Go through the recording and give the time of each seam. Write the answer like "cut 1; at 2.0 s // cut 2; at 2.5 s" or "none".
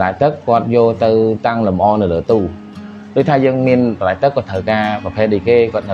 none

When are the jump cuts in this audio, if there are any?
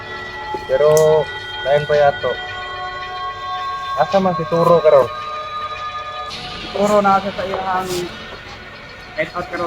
cut 1; at 5.1 s // cut 2; at 6.5 s

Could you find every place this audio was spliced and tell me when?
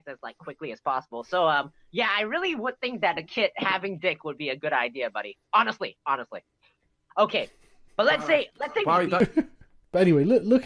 cut 1; at 9.2 s

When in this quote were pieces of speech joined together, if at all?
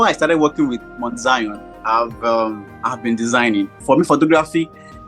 cut 1; at 3.8 s

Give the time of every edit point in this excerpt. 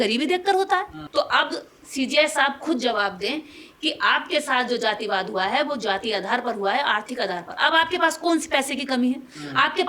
cut 1; at 1.0 s

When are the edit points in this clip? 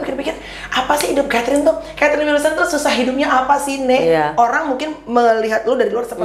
none

